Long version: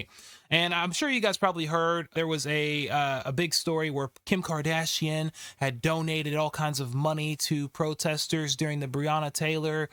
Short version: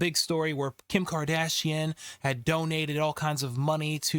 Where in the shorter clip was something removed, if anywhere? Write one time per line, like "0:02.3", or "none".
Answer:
none